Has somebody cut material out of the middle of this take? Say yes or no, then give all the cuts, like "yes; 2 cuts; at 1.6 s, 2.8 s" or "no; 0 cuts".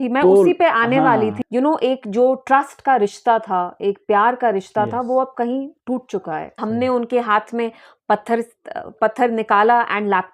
yes; 2 cuts; at 1.4 s, 6.6 s